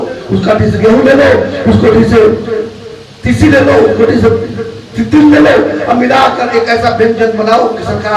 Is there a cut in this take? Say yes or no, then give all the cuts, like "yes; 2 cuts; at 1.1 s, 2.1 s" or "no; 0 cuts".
no; 0 cuts